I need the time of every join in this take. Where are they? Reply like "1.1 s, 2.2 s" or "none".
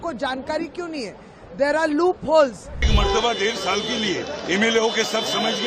2.9 s